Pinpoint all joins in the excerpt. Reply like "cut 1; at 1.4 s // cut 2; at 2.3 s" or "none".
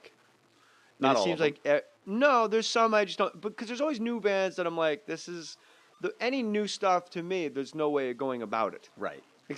none